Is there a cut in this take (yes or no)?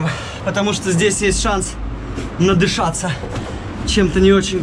no